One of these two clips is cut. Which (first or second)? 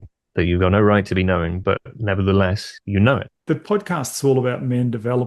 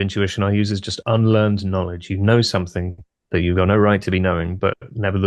first